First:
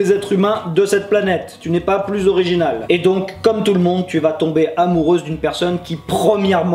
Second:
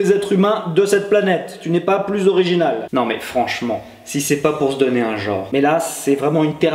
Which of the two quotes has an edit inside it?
second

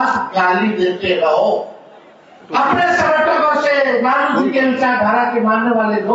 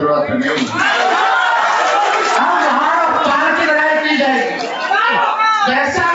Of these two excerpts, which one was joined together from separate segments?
first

